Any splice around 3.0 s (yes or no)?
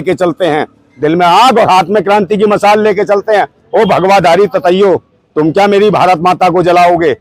no